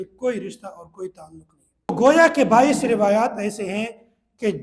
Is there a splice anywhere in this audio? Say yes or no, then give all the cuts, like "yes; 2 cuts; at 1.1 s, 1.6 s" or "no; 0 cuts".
yes; 1 cut; at 1.9 s